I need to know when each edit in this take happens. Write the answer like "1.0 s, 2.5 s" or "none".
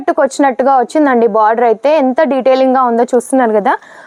none